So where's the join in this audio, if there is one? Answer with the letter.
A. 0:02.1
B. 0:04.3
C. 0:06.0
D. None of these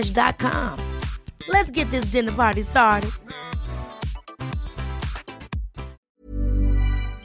C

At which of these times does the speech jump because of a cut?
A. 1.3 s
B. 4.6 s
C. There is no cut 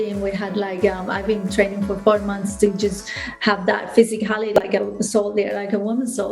B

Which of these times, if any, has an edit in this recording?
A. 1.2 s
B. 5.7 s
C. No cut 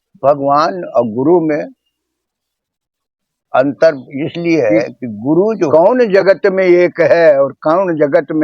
B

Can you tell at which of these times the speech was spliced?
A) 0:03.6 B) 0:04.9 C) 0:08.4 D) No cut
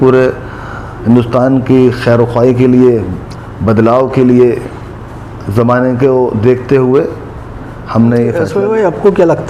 C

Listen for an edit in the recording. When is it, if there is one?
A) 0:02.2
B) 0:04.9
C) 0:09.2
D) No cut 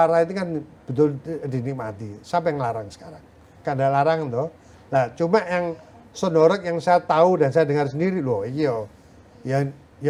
D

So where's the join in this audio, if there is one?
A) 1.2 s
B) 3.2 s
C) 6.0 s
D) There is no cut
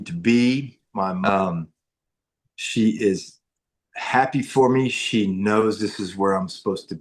A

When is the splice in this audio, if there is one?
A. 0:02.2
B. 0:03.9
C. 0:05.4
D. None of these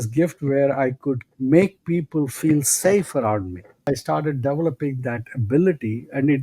B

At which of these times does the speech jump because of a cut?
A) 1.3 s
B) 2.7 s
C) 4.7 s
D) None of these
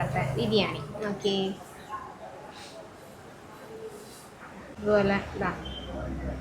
C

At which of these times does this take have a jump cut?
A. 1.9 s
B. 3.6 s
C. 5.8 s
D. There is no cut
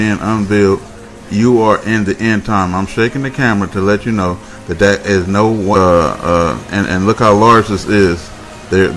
D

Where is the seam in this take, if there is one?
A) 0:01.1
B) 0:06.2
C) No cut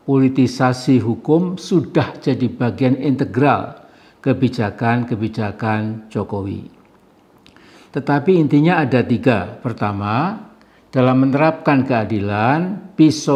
C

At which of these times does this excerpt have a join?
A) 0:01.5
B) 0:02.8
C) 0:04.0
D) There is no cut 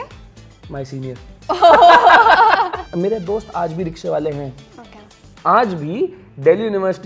B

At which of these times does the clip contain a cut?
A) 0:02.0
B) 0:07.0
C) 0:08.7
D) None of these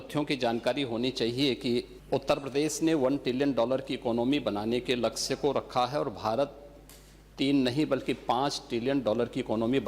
A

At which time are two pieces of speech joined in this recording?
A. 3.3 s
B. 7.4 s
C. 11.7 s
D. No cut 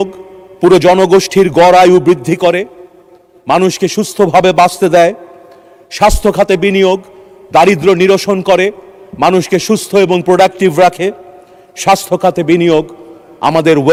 D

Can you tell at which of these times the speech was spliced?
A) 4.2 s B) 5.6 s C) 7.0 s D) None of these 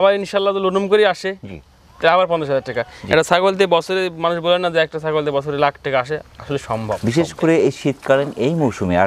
C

